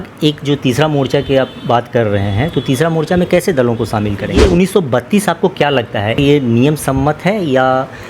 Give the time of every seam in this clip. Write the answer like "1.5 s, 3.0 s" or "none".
4.3 s, 6.2 s